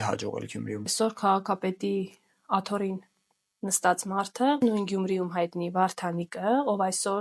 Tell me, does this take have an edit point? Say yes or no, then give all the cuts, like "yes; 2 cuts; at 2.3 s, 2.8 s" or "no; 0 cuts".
yes; 2 cuts; at 0.9 s, 4.6 s